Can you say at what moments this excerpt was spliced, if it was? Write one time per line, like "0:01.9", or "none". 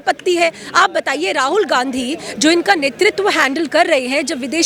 none

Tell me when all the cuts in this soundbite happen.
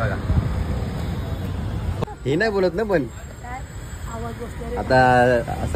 0:01.9

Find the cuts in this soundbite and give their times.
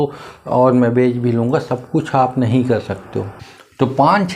0:03.4

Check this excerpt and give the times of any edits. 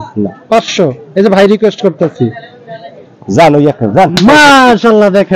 none

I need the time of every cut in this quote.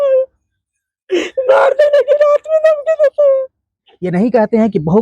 0:03.9

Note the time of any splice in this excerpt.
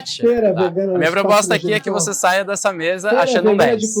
none

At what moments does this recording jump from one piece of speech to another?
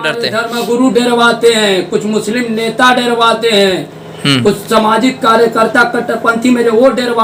none

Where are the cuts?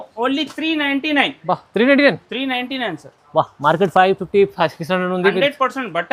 none

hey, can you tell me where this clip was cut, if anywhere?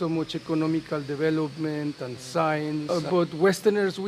0:02.9

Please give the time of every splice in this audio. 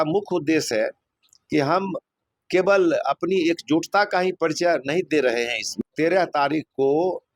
0:05.8

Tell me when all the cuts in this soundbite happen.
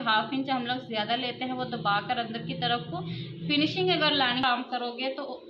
0:04.4

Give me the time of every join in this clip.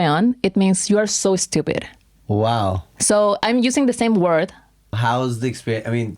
0:05.0

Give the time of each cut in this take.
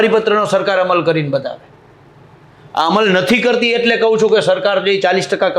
none

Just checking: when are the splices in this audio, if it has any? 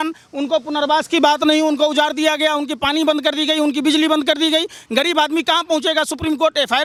none

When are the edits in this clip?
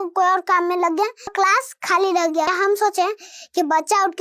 0:01.3
0:02.5

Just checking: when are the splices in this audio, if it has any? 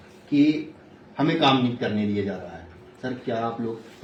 none

